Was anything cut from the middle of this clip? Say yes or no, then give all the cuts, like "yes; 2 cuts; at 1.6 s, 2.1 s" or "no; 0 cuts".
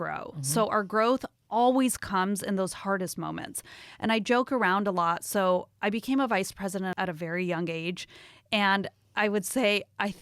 yes; 2 cuts; at 6.9 s, 9.1 s